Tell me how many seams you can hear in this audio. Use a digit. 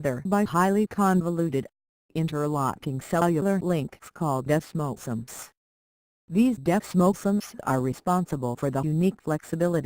0